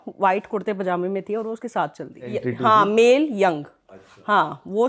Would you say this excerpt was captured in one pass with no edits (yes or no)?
no